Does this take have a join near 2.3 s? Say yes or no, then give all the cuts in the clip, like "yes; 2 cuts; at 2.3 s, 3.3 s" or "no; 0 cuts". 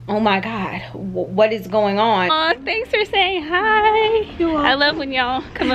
yes; 1 cut; at 2.3 s